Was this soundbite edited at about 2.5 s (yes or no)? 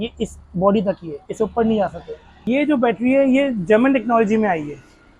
yes